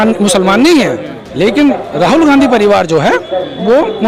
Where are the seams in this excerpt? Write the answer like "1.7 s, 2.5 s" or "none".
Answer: none